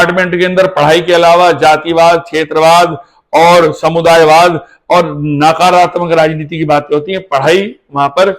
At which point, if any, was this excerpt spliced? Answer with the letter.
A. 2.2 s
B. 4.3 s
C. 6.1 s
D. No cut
D